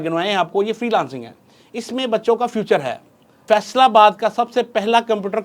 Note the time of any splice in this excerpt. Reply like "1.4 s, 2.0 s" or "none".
3.4 s